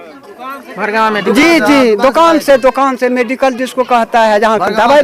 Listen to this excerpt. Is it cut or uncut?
uncut